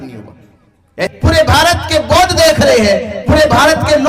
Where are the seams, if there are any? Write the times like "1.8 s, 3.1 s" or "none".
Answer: 1.1 s